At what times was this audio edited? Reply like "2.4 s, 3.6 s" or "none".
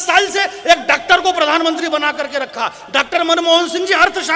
none